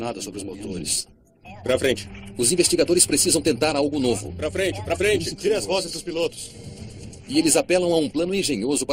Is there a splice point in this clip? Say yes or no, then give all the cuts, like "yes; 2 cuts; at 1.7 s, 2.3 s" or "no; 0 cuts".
no; 0 cuts